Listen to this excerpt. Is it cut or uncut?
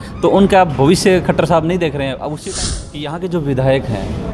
cut